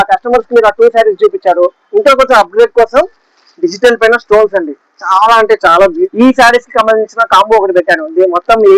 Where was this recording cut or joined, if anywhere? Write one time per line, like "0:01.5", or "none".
0:06.0

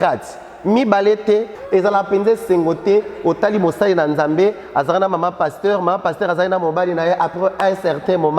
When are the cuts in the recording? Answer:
0:01.5

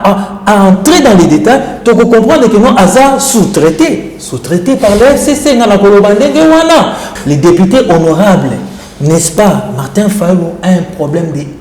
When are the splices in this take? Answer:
0:07.1

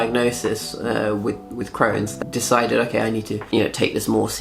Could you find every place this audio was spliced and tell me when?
0:02.1
0:03.5

